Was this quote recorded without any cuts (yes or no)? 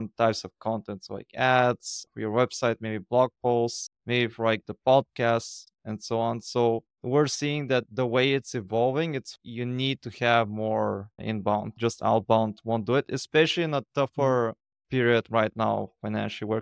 yes